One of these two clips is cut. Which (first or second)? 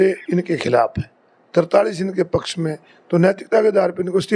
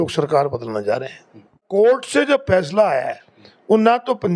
second